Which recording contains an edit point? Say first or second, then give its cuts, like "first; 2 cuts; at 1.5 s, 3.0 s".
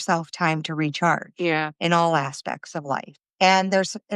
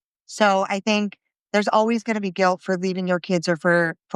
first; 1 cut; at 3.2 s